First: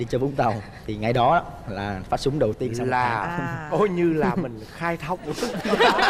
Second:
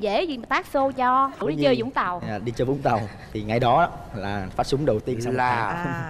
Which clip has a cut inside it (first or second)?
second